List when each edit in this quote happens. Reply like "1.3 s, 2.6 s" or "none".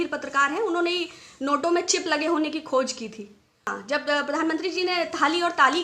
3.7 s